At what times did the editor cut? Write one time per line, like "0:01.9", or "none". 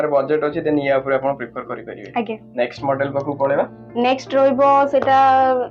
none